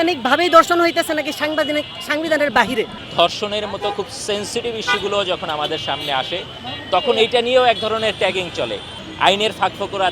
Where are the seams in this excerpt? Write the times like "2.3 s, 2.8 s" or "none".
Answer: 3.0 s, 9.0 s

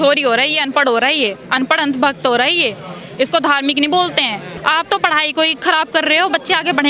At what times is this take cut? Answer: 4.5 s

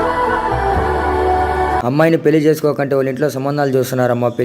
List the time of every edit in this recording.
1.8 s

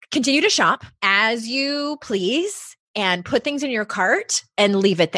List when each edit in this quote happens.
0.9 s

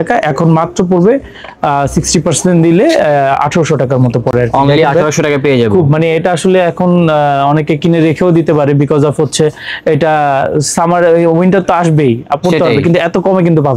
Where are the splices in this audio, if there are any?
none

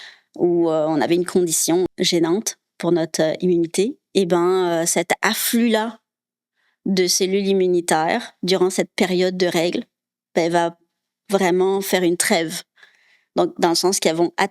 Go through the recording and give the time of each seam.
1.9 s

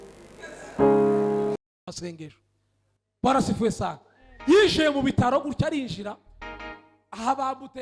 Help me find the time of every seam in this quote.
1.7 s

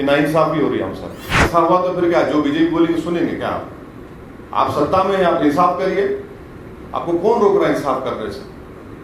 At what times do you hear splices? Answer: 1.4 s

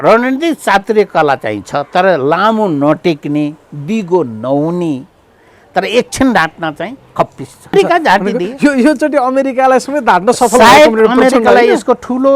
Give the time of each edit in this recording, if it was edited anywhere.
7.7 s

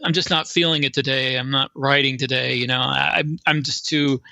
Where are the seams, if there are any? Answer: none

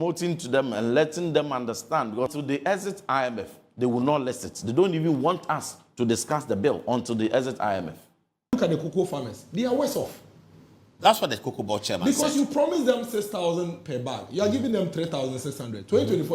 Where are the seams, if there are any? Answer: 2.4 s, 8.5 s

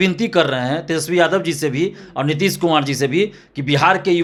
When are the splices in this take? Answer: none

